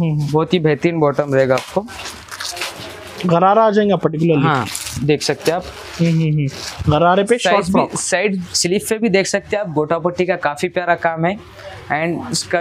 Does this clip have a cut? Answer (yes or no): yes